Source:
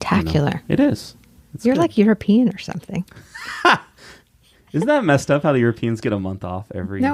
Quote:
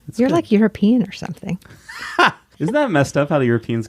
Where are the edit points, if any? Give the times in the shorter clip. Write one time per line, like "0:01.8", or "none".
0:02.5